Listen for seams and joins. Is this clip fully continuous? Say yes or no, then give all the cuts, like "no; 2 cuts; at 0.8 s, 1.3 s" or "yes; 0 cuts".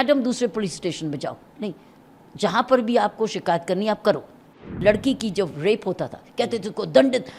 no; 1 cut; at 4.6 s